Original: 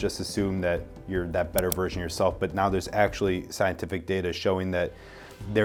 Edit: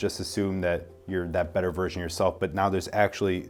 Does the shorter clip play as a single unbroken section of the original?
yes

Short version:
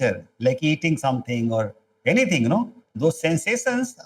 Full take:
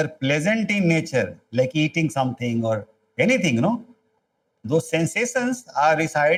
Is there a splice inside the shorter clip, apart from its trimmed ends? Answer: yes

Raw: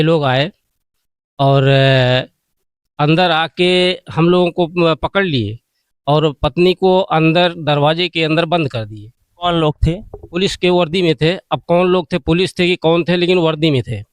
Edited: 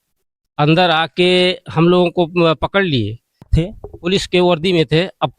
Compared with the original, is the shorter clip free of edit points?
no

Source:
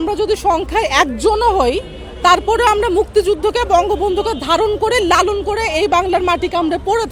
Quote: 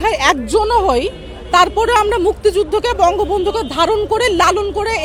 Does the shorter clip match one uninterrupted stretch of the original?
yes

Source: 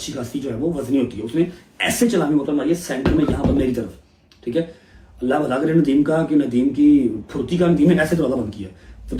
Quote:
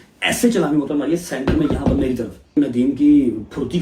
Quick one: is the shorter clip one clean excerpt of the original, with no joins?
no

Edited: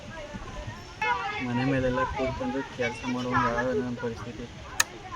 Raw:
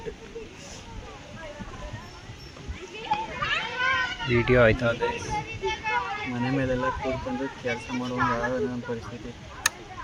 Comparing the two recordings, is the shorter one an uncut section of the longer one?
no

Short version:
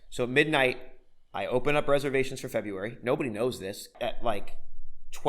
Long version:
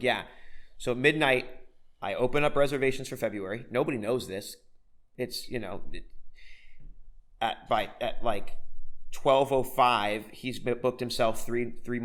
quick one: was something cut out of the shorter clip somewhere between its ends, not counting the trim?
yes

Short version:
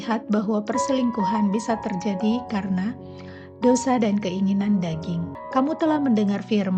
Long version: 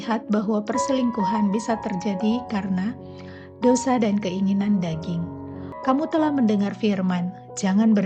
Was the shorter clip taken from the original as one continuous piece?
no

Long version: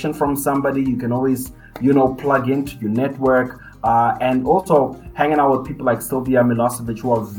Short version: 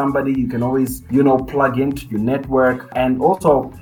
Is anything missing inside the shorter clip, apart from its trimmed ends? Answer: yes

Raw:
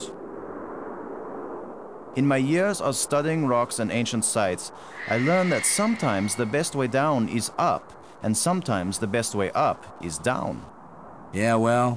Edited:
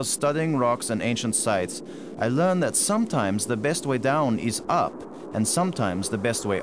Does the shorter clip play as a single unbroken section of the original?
yes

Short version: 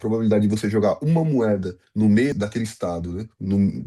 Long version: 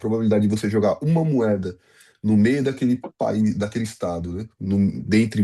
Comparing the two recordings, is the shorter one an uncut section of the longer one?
no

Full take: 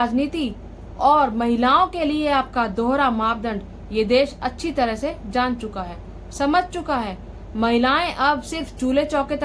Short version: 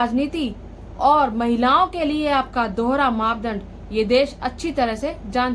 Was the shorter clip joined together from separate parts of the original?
no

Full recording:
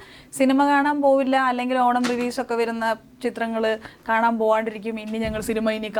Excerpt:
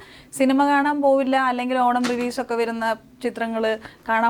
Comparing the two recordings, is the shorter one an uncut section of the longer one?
yes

